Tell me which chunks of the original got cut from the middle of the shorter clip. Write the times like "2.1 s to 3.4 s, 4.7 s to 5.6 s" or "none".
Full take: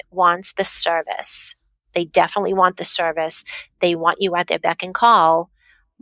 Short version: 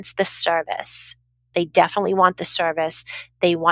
none